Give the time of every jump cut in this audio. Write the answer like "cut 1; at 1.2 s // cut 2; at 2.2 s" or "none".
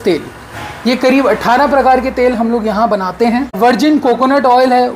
cut 1; at 3.6 s